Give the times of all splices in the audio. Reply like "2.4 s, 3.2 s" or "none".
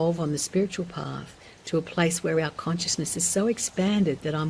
none